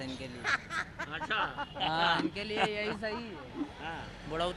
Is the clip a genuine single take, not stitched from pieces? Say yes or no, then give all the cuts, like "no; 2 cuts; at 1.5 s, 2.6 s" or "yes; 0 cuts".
yes; 0 cuts